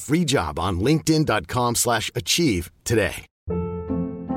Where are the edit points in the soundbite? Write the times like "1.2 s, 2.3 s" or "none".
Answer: 3.3 s